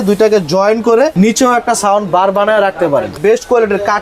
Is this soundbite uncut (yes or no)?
no